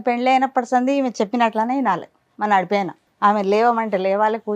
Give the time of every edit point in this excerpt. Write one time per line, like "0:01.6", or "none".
0:03.0

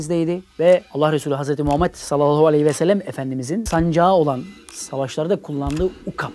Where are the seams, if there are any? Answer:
0:03.6

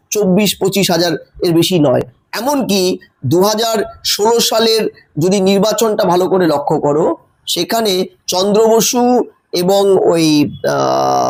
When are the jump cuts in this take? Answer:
none

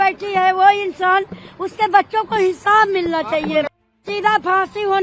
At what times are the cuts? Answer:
0:04.0

